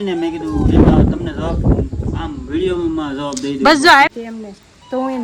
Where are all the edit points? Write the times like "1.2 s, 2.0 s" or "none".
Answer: 4.1 s